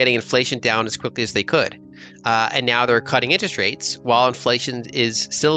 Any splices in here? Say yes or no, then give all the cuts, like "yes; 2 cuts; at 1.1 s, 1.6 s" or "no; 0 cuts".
no; 0 cuts